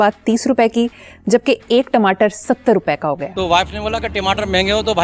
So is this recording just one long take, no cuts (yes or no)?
no